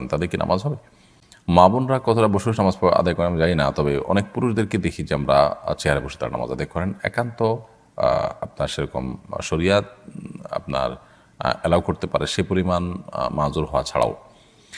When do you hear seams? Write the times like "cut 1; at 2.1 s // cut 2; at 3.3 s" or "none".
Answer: none